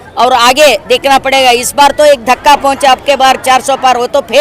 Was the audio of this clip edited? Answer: no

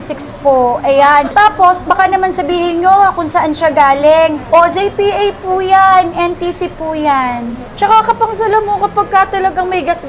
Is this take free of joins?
no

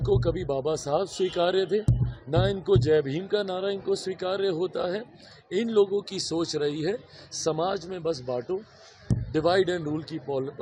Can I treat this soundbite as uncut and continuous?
yes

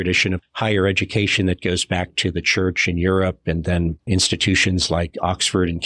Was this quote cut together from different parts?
yes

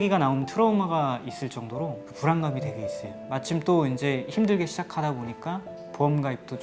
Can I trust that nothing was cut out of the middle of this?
yes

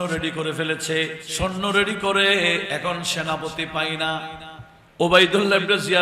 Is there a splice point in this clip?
yes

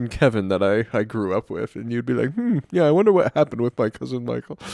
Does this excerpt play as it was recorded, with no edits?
yes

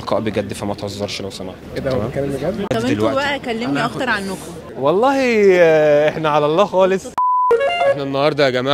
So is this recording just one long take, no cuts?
yes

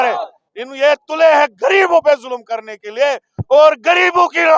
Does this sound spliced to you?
no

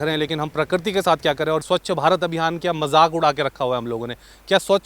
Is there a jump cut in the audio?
yes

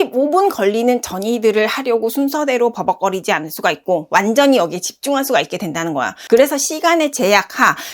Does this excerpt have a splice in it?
yes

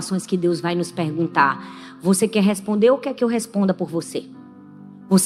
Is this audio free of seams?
yes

